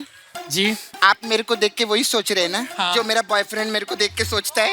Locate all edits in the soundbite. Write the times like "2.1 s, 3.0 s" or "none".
0.9 s, 2.7 s

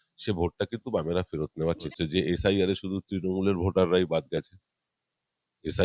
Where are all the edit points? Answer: 1.9 s

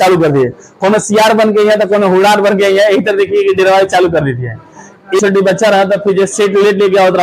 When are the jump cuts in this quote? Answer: 5.2 s

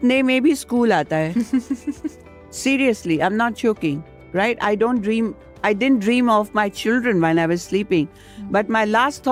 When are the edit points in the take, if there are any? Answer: none

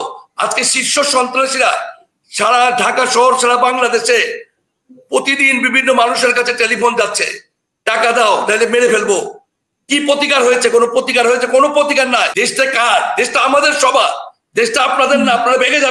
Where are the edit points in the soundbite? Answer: 12.3 s

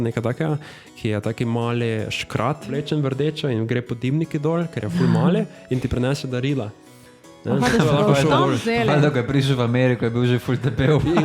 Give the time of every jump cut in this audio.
2.7 s

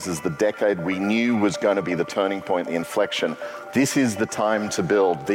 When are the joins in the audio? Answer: 3.5 s

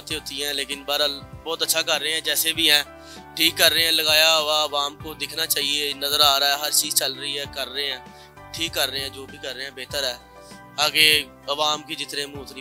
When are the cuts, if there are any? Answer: none

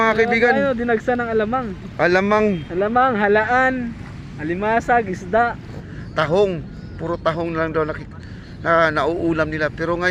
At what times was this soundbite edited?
5.7 s

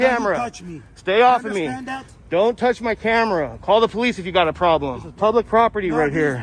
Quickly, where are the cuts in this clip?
5.0 s

